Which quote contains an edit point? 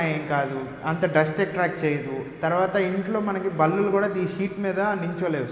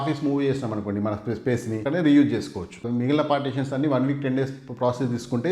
second; 2 cuts; at 1.8 s, 2.8 s

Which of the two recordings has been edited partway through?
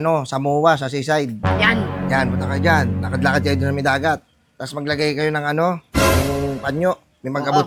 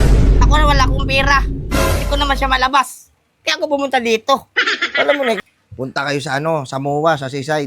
second; 1 cut; at 5.4 s

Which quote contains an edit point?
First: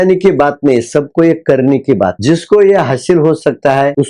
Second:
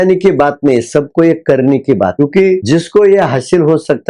first; 1 cut; at 2.2 s

